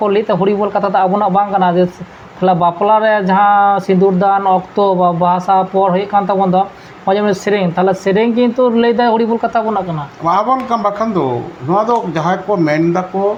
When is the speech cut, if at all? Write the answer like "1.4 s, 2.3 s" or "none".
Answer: none